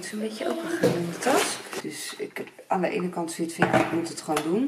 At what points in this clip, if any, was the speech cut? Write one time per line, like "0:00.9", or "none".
0:01.8